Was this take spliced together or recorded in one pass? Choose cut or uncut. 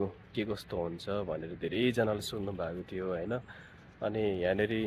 uncut